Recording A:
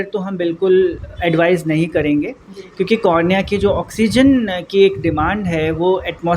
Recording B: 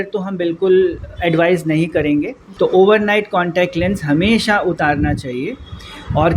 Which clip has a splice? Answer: B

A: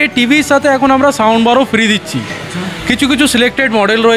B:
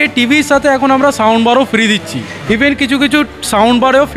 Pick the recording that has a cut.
B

